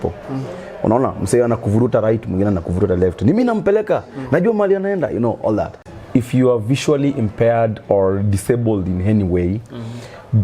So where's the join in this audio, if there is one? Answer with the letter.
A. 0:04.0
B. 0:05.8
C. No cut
B